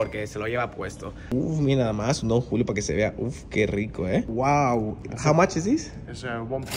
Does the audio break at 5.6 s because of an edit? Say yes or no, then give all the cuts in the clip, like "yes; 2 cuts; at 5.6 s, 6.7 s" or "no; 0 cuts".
no; 2 cuts; at 1.2 s, 4.3 s